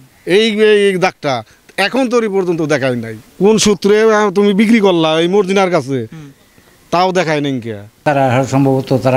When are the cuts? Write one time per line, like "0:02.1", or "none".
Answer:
0:03.1
0:07.9